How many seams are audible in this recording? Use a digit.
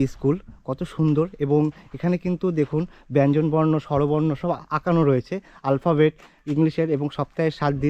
0